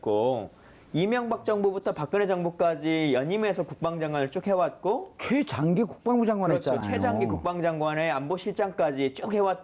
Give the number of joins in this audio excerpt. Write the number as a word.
one